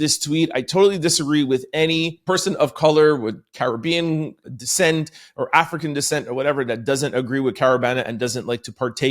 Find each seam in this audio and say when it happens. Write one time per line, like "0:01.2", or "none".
0:02.2
0:04.4